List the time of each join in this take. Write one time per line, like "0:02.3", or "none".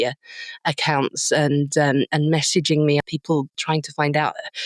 0:03.2